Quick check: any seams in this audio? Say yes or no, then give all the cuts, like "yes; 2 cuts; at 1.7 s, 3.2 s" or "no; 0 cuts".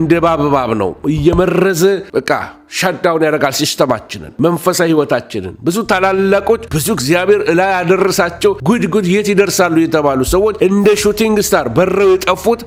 no; 0 cuts